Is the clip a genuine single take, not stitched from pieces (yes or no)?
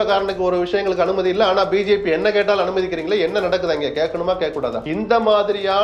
no